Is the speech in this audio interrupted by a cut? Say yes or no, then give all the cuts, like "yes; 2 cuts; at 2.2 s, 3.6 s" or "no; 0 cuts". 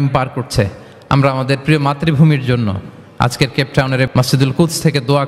yes; 1 cut; at 4.1 s